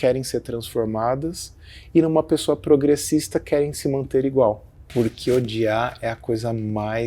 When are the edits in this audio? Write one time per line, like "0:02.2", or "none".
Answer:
0:04.7